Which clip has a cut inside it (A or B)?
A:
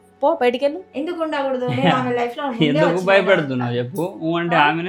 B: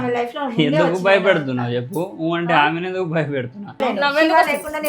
B